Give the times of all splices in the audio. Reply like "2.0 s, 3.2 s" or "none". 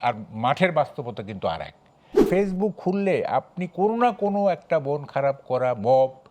2.2 s